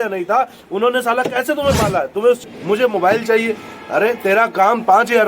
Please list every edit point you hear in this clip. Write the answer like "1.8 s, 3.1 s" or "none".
2.5 s